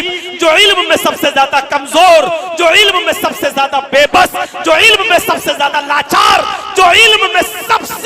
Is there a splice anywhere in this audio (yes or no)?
no